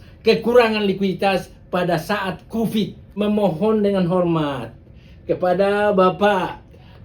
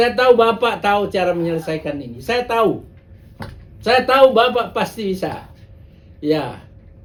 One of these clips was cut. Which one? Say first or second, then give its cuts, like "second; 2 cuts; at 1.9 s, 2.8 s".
first; 1 cut; at 3.2 s